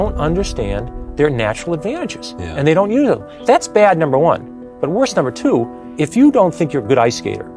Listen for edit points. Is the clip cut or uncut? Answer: cut